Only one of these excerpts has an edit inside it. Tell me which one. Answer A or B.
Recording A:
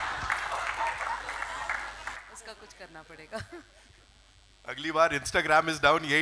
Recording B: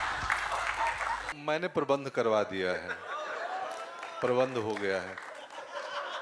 B